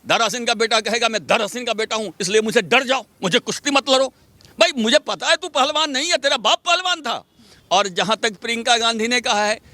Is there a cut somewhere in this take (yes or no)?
yes